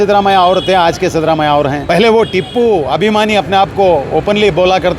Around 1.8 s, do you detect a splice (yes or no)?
yes